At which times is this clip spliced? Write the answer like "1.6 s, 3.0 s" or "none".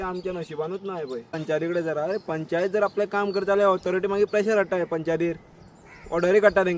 1.3 s